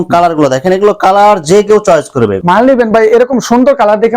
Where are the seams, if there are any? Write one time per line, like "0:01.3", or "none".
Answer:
0:02.4